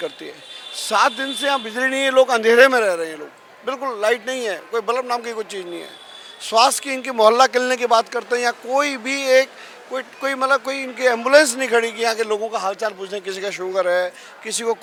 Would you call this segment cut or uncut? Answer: uncut